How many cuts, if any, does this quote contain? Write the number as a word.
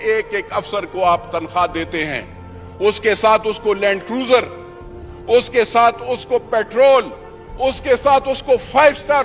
zero